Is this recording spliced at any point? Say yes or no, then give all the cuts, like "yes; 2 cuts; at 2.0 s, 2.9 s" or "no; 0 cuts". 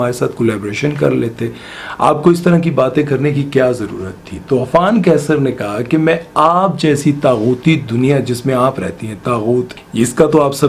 no; 0 cuts